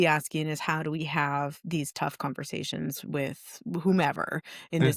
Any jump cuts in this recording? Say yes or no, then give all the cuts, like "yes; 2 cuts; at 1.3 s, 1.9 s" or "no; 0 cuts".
no; 0 cuts